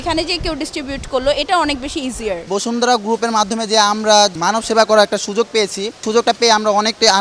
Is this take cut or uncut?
cut